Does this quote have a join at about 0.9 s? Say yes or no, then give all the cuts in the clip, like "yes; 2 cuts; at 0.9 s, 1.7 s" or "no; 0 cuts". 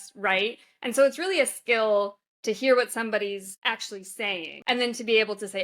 no; 2 cuts; at 3.5 s, 4.5 s